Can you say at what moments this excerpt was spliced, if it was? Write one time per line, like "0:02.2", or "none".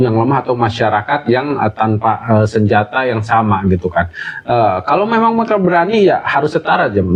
none